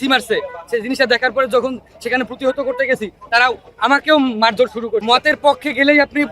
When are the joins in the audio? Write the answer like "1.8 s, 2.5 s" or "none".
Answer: 5.0 s